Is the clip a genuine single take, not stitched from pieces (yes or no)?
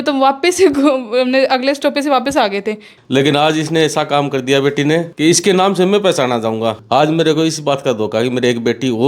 no